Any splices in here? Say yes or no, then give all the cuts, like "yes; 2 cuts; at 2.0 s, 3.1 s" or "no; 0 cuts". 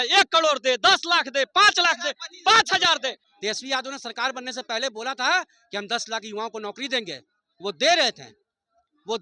yes; 1 cut; at 3.2 s